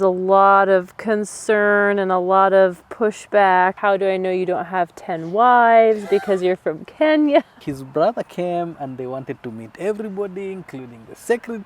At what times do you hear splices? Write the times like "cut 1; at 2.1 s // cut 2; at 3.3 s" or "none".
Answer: cut 1; at 3.8 s // cut 2; at 7.6 s